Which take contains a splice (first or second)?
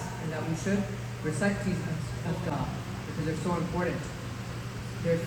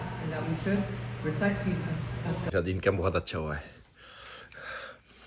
second